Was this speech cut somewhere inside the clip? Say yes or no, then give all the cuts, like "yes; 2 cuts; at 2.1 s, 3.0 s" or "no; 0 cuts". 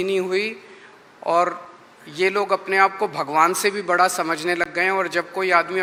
no; 0 cuts